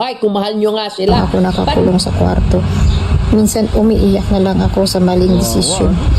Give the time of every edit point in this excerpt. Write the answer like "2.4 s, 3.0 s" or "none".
1.1 s